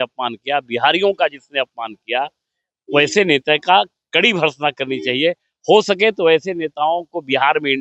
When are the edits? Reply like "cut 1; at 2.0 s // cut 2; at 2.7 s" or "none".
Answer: none